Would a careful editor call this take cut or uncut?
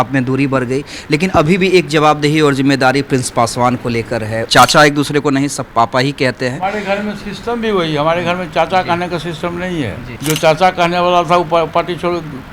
cut